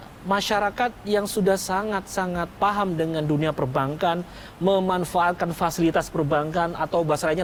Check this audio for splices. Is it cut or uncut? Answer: uncut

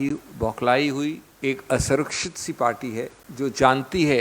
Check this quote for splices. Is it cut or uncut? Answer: cut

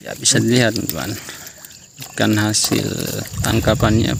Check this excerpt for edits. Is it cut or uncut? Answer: uncut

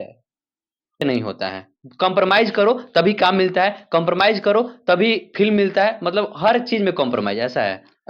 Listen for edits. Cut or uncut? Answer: cut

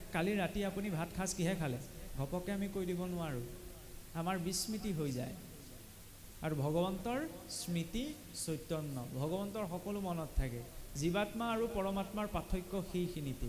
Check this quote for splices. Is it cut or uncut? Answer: uncut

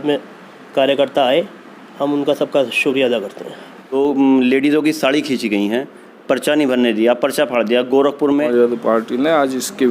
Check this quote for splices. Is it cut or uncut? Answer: cut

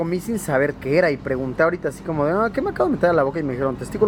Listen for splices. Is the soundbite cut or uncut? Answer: uncut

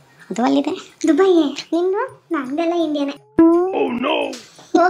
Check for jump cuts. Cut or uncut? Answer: cut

